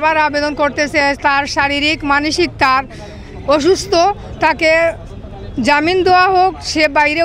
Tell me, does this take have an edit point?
no; 0 cuts

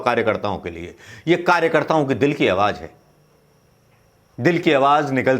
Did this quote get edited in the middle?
no; 0 cuts

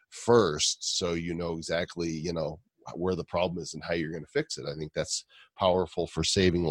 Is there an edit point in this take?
no; 0 cuts

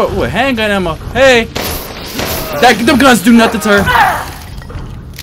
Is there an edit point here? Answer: no; 0 cuts

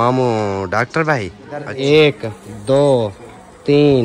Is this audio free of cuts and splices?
no; 1 cut; at 1.7 s

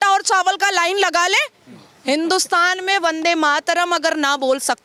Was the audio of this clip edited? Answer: no; 0 cuts

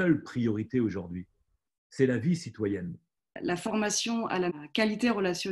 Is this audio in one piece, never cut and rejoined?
no; 2 cuts; at 3.3 s, 4.5 s

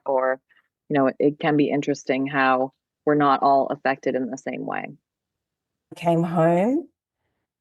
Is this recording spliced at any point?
yes; 1 cut; at 5.9 s

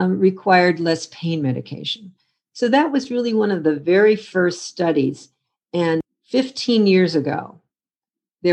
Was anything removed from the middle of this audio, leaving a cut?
yes; 1 cut; at 6.1 s

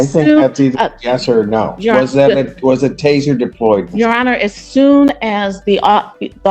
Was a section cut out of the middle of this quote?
no; 0 cuts

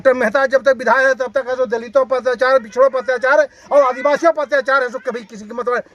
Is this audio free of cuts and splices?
yes; 0 cuts

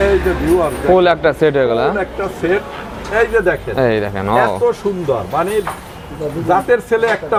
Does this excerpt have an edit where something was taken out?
no; 0 cuts

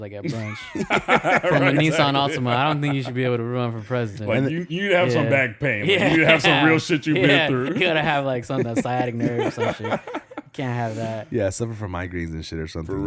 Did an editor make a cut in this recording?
no; 0 cuts

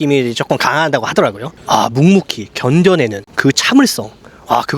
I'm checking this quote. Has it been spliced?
yes; 1 cut; at 1.6 s

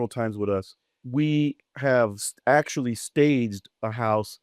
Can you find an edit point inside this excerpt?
yes; 1 cut; at 1.0 s

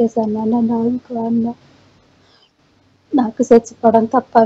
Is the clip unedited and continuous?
yes; 0 cuts

